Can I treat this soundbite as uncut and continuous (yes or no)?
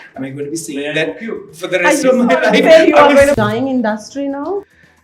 no